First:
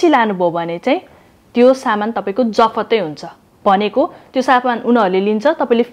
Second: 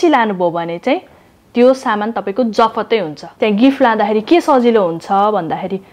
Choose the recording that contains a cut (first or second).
second